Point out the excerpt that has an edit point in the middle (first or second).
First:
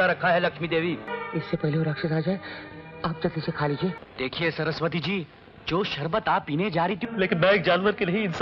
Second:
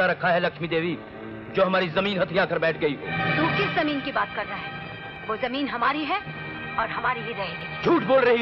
first